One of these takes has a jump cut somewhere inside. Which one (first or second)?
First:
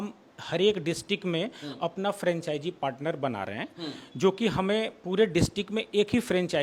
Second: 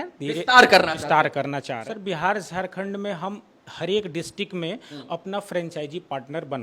second